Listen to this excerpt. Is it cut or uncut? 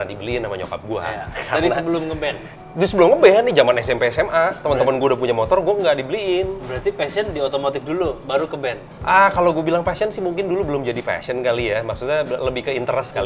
uncut